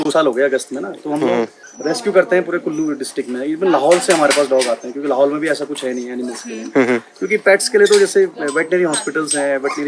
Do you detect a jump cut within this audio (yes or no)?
no